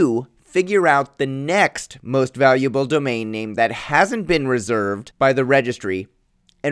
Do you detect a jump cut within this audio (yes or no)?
yes